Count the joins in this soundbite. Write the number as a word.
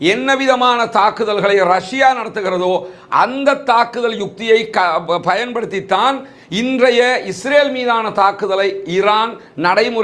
zero